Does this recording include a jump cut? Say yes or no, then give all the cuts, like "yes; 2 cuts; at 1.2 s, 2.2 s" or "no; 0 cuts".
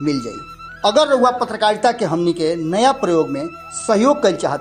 no; 0 cuts